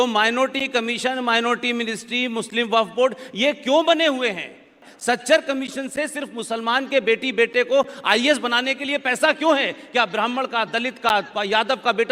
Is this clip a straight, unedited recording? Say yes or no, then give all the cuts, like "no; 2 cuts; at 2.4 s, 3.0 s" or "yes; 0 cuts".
no; 1 cut; at 4.8 s